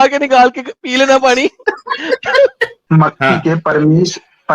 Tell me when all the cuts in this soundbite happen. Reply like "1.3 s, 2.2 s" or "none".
2.8 s